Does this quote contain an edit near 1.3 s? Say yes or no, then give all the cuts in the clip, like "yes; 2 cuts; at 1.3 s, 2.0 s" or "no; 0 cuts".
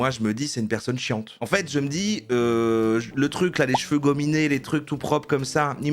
yes; 1 cut; at 1.3 s